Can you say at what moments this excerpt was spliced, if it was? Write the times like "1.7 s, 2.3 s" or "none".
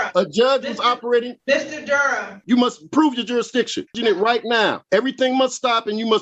1.3 s, 2.4 s, 3.8 s, 4.8 s